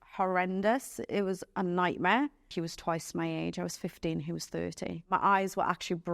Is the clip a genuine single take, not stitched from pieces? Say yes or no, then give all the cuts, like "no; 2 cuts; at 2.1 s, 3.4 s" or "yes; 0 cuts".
no; 2 cuts; at 2.5 s, 5.1 s